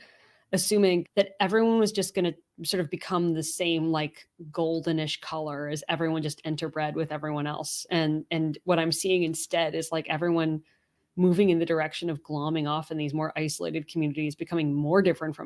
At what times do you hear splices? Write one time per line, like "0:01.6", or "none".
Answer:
0:01.0